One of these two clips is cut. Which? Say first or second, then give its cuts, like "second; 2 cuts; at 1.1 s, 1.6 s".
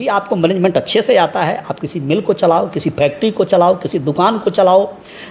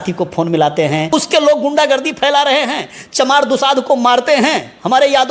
second; 1 cut; at 1.1 s